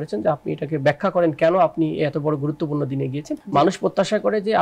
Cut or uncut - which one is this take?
cut